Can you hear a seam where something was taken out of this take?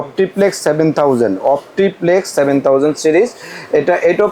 no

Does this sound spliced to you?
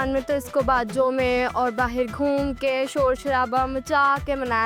no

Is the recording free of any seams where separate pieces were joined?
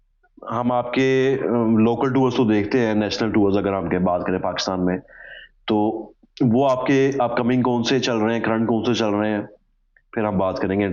yes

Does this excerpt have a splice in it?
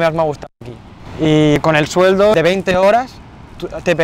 yes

